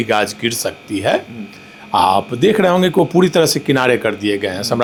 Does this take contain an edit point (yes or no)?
no